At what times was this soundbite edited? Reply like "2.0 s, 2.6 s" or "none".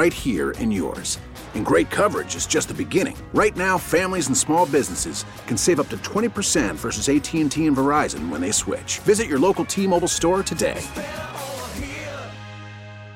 none